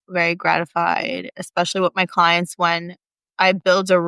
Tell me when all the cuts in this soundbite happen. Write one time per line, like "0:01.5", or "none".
none